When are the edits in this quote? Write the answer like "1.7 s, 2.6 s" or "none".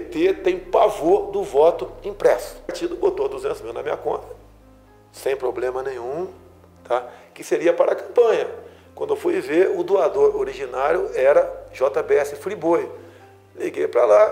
2.8 s